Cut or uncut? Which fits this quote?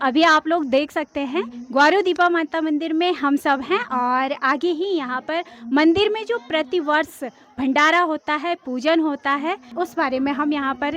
cut